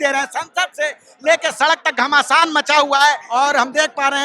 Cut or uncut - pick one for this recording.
cut